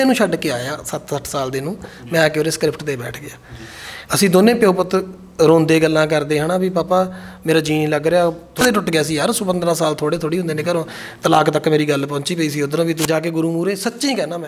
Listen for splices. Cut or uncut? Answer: cut